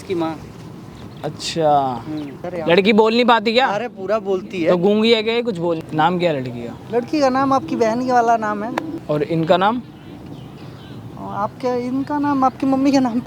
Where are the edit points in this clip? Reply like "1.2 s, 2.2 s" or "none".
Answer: 2.4 s, 5.9 s, 8.9 s